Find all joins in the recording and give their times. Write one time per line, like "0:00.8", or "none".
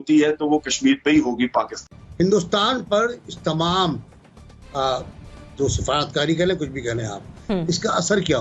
0:02.0